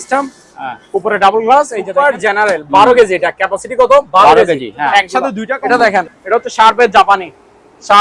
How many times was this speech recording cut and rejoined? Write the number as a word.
two